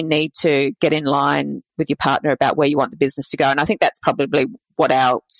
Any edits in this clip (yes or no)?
no